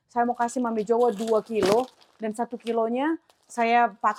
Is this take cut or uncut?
uncut